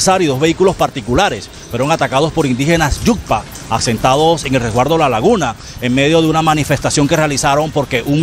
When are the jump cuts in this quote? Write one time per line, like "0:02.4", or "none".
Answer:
none